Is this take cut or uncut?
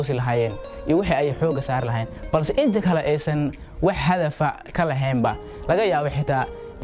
uncut